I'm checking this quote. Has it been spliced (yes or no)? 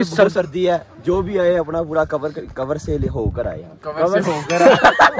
yes